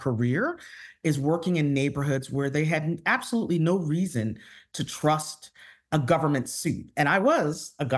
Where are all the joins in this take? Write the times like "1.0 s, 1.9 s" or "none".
none